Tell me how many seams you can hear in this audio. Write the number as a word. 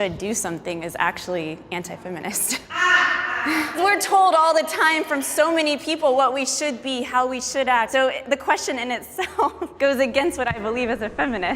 three